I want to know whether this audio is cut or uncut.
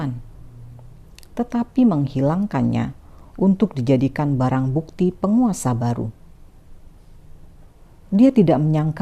cut